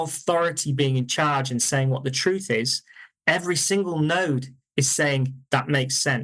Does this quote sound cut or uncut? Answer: uncut